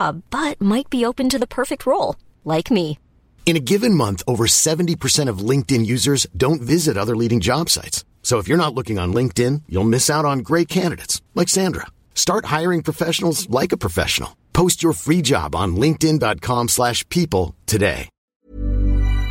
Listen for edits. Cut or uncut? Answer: cut